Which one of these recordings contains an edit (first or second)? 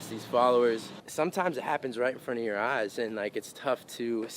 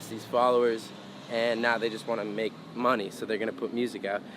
first